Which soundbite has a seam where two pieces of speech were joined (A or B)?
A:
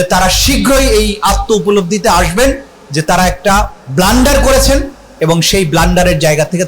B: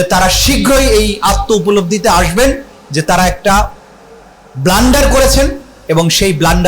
A